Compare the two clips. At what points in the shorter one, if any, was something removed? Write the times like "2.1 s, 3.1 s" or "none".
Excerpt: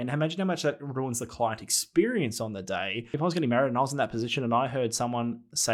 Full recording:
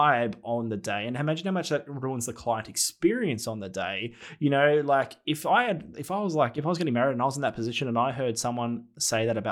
3.1 s

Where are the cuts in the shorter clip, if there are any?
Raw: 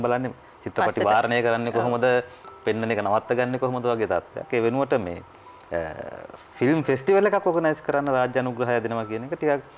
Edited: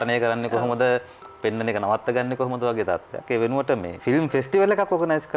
3.9 s

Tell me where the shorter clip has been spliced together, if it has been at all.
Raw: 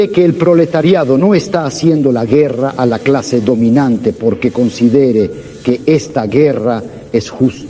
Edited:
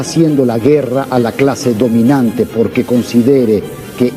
none

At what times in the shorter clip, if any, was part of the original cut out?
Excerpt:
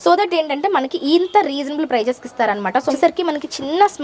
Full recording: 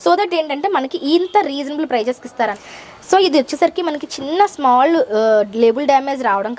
2.9 s

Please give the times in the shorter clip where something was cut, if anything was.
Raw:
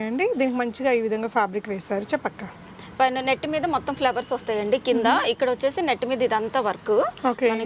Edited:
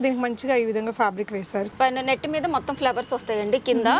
1.7 s

